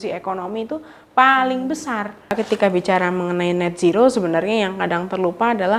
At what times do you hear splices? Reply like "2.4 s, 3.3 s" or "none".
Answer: 2.3 s